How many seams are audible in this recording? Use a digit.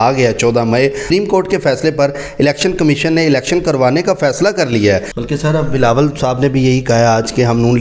2